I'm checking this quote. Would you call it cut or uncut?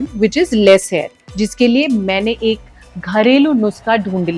uncut